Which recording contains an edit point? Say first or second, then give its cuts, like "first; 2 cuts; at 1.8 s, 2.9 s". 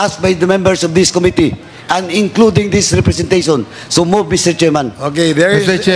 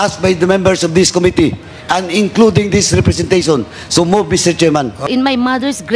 second; 1 cut; at 5.0 s